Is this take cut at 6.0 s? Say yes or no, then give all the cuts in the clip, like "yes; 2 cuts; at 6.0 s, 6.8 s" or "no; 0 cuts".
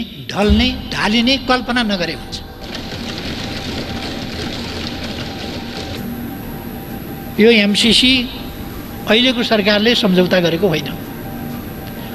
yes; 1 cut; at 6.0 s